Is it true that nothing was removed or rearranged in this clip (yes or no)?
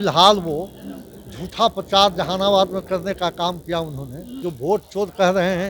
no